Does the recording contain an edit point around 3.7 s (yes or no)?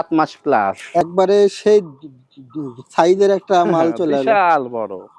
no